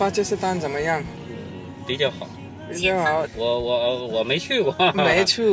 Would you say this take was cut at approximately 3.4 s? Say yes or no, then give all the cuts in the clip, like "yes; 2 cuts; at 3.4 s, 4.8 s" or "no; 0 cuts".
no; 0 cuts